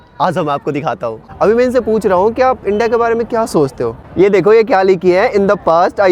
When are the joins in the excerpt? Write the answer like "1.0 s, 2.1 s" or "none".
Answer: 1.3 s, 4.0 s